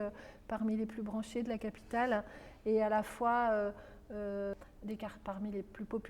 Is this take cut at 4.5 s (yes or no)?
yes